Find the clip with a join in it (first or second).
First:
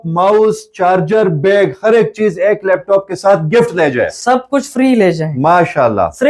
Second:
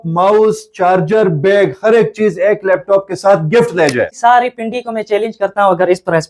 second